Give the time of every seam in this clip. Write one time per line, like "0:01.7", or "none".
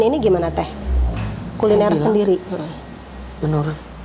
none